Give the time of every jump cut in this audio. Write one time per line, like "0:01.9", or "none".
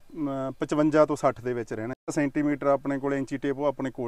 0:02.1